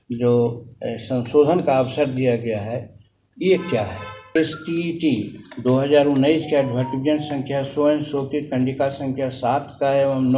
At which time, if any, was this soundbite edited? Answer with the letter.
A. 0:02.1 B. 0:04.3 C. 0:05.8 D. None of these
B